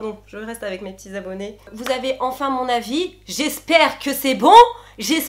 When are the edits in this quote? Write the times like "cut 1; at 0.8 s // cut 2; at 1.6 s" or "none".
cut 1; at 1.7 s